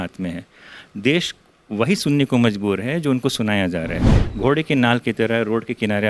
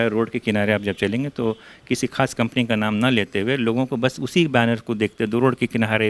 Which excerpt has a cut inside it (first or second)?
first